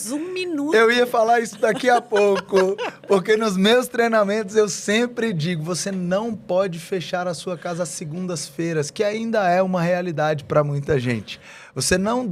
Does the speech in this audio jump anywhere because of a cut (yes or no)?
no